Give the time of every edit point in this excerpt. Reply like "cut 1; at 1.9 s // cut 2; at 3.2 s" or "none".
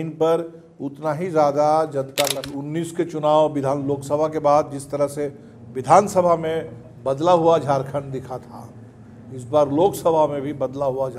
cut 1; at 2.5 s